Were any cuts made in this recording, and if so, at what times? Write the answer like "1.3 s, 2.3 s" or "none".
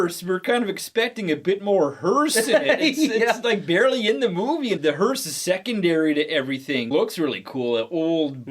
4.8 s, 6.9 s